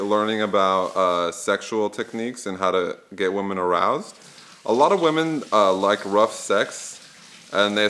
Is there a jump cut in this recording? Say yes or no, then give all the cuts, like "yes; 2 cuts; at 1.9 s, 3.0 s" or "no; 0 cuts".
no; 0 cuts